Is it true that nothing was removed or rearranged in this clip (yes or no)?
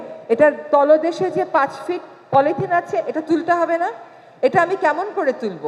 yes